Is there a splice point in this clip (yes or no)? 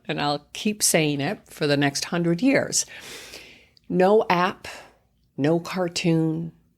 yes